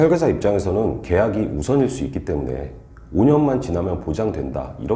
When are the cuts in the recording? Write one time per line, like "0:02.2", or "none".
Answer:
none